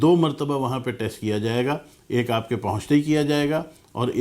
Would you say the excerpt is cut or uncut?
uncut